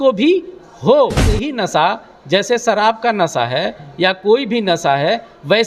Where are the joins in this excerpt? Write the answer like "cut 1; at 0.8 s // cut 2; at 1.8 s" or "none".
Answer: cut 1; at 1.5 s